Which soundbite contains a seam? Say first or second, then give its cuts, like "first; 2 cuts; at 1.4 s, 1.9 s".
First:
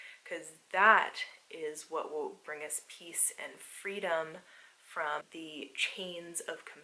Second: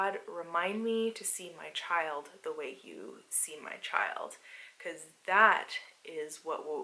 first; 1 cut; at 5.3 s